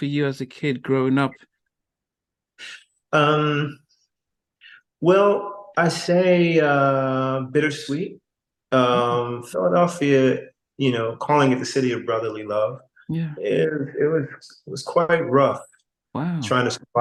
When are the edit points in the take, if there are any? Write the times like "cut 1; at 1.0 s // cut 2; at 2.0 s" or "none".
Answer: none